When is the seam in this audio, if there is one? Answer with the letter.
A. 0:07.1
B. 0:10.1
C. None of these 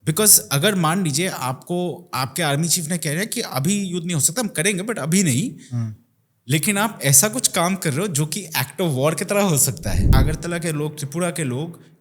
B